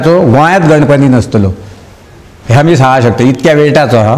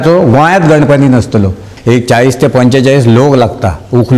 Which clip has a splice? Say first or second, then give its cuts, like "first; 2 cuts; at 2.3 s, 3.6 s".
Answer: second; 1 cut; at 1.7 s